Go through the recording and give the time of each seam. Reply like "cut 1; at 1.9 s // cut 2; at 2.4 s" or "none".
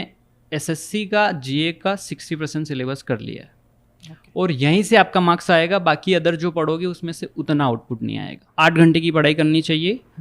cut 1; at 8.4 s